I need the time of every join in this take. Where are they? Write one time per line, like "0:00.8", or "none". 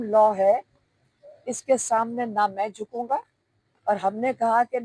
none